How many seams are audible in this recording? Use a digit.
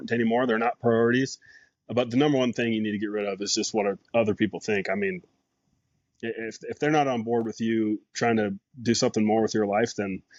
0